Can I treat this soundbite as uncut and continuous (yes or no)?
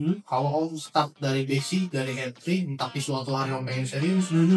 yes